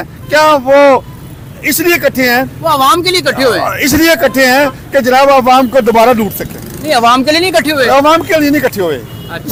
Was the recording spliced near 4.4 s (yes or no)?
no